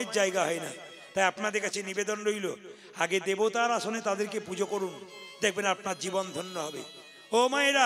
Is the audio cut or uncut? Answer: uncut